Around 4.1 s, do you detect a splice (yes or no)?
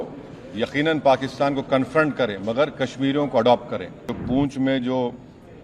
yes